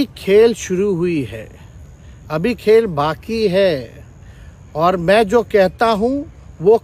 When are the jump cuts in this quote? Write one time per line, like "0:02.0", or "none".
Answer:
none